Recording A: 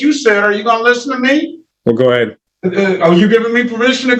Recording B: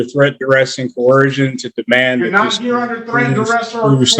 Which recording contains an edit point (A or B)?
A